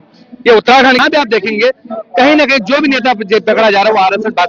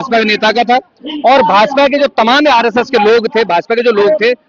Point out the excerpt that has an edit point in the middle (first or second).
first